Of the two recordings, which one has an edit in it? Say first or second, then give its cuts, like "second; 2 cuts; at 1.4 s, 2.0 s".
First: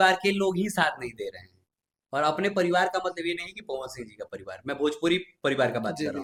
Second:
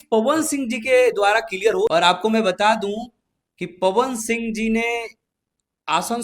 second; 1 cut; at 1.9 s